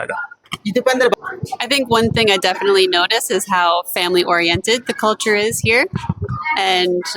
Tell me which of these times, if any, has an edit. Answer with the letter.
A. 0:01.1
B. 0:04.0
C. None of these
A